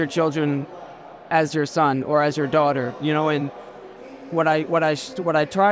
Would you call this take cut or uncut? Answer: uncut